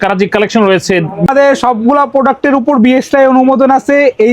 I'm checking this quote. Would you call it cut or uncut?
cut